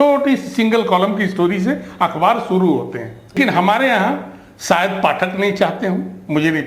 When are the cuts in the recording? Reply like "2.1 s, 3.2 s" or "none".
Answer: 3.3 s